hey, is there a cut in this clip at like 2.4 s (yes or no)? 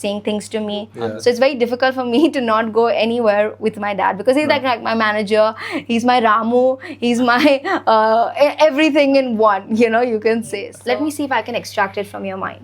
no